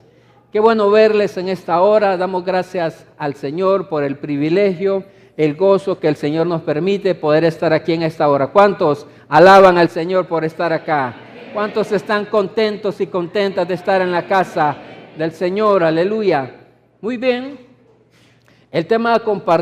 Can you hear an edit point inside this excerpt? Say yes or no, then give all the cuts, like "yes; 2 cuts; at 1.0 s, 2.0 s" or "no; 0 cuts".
yes; 1 cut; at 9.2 s